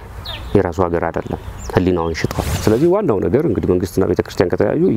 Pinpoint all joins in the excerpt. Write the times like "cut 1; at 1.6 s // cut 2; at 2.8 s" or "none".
cut 1; at 2.5 s